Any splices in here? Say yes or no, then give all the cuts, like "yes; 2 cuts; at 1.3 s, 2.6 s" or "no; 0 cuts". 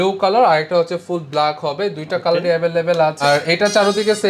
yes; 1 cut; at 3.2 s